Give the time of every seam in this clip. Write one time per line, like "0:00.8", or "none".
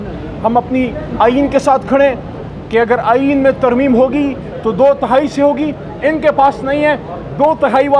0:02.3